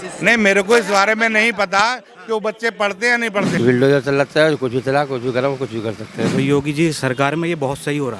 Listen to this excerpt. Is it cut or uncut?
cut